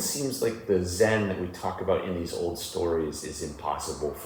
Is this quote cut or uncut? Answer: uncut